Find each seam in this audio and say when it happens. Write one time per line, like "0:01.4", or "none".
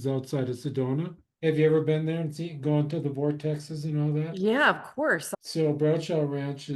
0:01.2
0:05.3